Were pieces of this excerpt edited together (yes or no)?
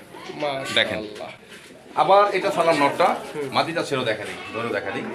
no